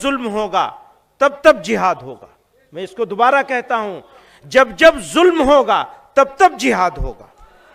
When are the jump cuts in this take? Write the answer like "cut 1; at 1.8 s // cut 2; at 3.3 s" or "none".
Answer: none